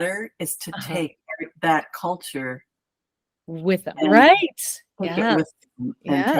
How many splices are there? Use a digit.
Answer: 0